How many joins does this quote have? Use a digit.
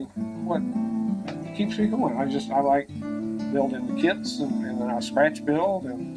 0